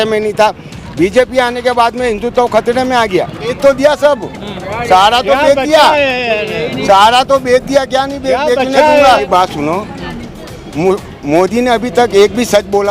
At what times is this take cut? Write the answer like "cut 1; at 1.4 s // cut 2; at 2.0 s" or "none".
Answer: cut 1; at 3.6 s // cut 2; at 9.2 s